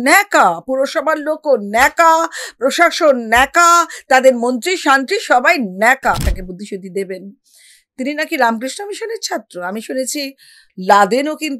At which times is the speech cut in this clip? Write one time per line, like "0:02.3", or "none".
0:06.3